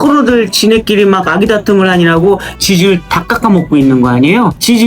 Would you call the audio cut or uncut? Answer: cut